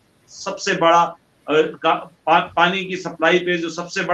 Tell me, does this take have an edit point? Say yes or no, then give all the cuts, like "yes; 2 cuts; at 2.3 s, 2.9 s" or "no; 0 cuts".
no; 0 cuts